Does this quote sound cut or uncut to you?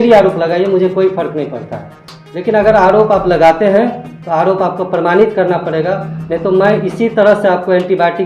uncut